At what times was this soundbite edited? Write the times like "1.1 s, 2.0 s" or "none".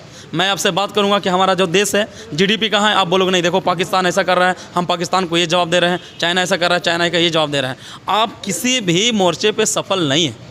none